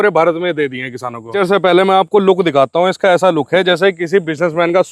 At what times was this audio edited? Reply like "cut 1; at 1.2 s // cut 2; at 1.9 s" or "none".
cut 1; at 1.3 s